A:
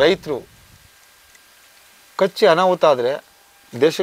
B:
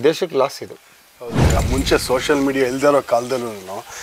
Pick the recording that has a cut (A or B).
B